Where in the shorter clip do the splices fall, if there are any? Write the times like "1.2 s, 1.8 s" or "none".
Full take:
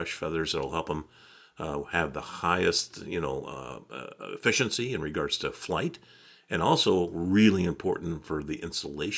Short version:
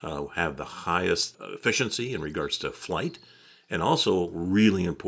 1.4 s

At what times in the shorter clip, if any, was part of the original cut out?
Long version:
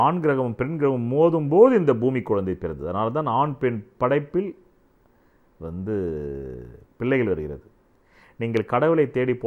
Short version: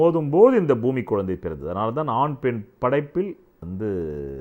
3.5 s

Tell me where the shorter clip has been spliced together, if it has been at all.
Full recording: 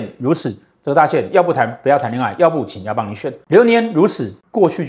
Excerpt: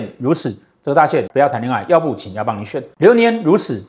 1.3 s

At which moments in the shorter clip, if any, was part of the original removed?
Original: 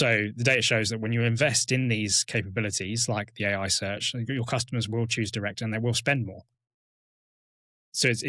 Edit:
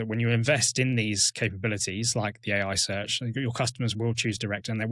none

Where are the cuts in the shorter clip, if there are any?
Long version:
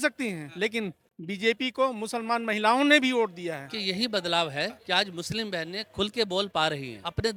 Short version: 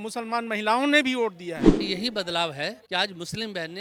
none

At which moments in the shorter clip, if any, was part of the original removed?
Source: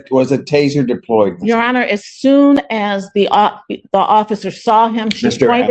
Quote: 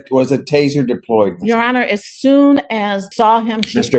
3.0 s

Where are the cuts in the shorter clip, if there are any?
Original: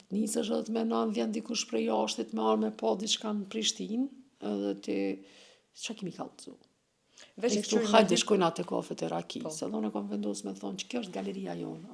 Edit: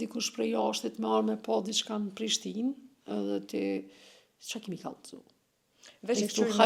none

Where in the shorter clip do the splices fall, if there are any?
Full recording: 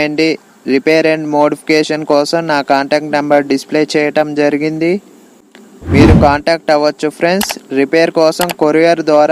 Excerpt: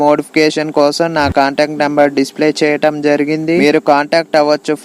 3.7 s

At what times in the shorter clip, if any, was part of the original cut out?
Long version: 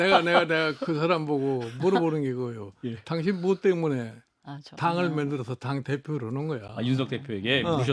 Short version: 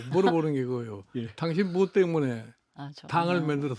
none

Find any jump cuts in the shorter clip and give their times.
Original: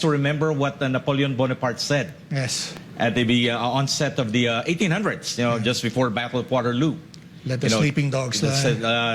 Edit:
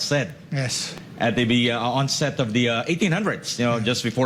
none

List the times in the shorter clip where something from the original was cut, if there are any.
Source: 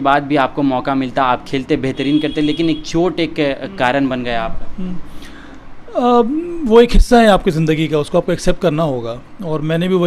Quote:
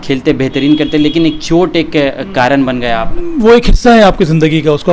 3.2 s

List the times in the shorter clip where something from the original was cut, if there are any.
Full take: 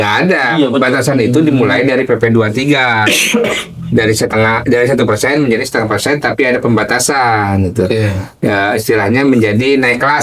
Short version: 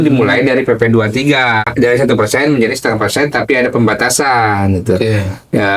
1.7 s

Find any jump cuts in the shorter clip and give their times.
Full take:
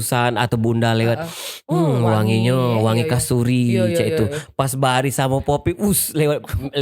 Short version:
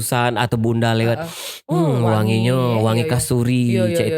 none

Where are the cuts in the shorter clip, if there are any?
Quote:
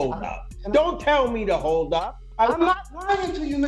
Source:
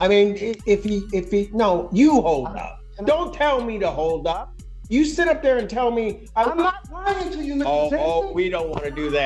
2.2 s

